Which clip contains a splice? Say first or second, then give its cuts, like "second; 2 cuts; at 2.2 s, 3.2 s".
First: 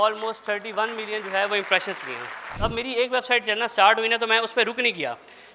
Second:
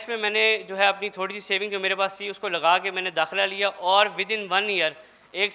first; 1 cut; at 2.5 s